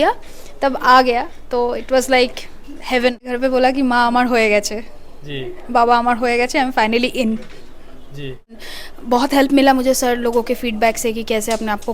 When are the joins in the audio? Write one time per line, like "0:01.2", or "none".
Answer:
0:03.3
0:08.6